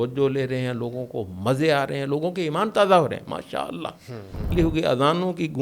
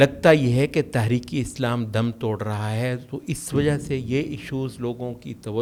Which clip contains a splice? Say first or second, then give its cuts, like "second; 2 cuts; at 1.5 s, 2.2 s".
first; 1 cut; at 4.5 s